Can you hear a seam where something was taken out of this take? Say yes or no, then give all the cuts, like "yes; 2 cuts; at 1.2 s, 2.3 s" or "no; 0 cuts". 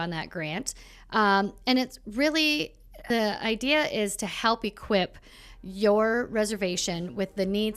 yes; 1 cut; at 2.9 s